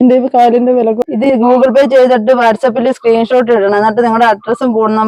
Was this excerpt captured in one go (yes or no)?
no